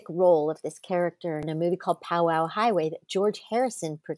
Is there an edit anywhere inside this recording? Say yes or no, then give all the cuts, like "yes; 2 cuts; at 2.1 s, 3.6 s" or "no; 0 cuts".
yes; 1 cut; at 1.5 s